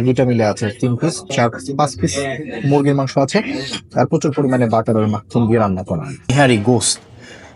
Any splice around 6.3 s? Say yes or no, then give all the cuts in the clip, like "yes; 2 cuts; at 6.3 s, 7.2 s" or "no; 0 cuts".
yes; 1 cut; at 6.3 s